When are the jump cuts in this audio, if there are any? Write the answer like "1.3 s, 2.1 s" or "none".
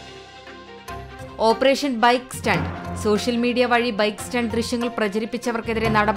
1.3 s